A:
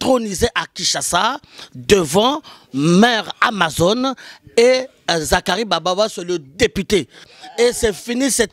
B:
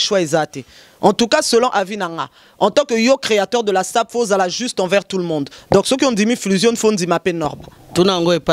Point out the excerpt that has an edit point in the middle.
A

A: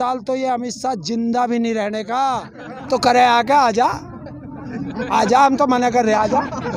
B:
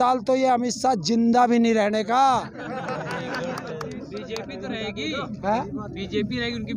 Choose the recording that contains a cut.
A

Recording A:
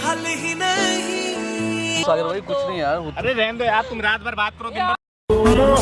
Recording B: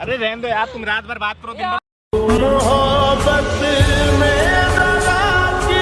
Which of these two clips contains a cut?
A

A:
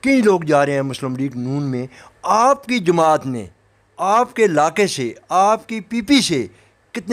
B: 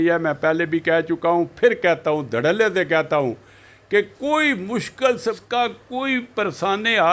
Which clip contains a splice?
B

